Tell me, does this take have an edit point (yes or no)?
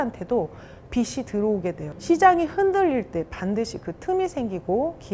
yes